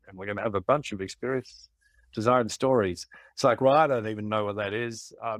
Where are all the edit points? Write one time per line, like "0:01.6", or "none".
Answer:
none